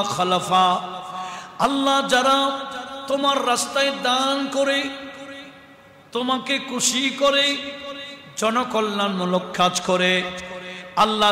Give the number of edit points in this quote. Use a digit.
0